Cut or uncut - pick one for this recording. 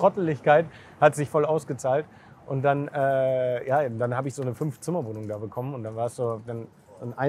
uncut